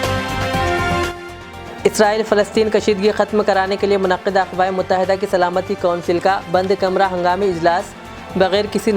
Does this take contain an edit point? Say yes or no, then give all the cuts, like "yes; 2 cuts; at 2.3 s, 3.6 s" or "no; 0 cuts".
no; 0 cuts